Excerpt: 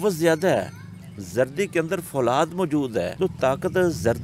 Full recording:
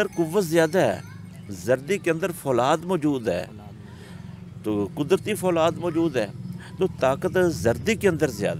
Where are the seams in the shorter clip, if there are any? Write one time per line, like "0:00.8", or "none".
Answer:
0:03.1